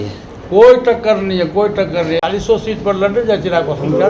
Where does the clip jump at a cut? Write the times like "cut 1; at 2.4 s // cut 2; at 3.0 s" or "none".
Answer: cut 1; at 2.2 s